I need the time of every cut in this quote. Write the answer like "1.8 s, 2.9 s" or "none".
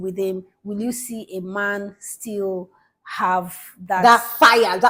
none